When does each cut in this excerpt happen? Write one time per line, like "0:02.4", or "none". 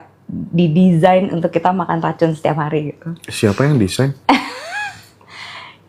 none